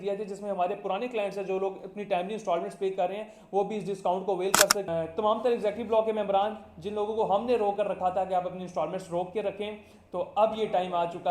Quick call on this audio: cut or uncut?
cut